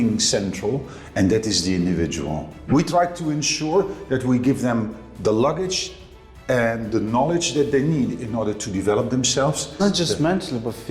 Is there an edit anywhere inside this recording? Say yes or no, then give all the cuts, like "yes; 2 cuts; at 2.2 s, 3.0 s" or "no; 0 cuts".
yes; 2 cuts; at 2.6 s, 9.8 s